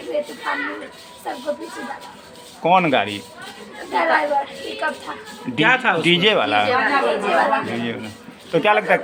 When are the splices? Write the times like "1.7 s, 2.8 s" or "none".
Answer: none